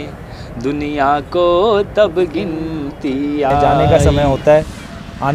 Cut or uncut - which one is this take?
cut